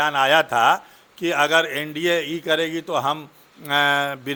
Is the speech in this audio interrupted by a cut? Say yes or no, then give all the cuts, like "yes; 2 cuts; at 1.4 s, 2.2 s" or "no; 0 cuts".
no; 0 cuts